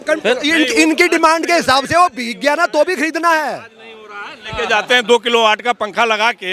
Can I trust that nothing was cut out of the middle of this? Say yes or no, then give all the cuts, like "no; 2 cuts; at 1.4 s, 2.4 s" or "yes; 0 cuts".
yes; 0 cuts